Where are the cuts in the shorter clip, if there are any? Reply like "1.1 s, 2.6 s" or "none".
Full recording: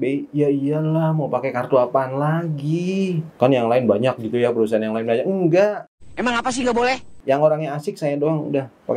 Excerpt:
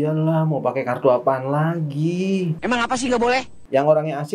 2.5 s